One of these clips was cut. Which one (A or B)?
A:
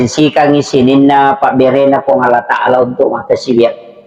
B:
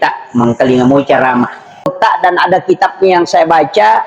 B